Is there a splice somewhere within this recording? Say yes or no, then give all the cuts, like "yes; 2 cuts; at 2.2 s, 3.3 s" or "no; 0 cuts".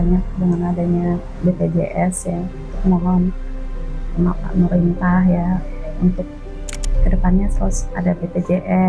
yes; 2 cuts; at 1.3 s, 2.6 s